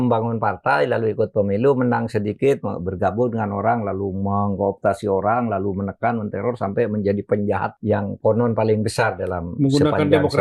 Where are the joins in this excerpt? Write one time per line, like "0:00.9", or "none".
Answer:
0:07.7